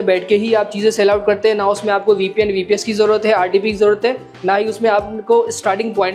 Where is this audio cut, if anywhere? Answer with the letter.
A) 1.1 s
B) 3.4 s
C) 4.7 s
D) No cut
D